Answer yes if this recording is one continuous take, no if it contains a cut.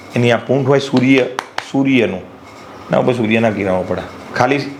yes